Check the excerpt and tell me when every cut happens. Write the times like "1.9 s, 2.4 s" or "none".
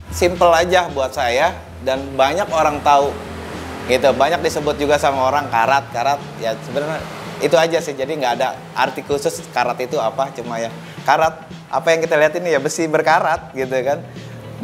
none